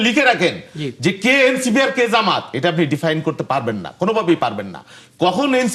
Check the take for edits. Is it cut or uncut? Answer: uncut